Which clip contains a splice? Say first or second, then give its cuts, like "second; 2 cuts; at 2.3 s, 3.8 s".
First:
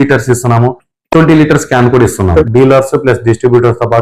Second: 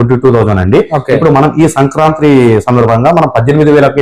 first; 1 cut; at 2.4 s